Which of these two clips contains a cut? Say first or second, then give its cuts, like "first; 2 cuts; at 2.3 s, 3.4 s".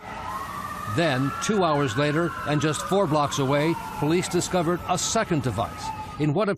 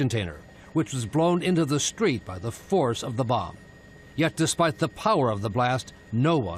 second; 1 cut; at 2.3 s